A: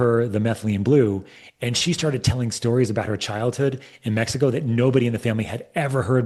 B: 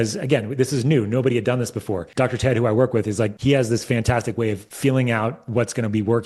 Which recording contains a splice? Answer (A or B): B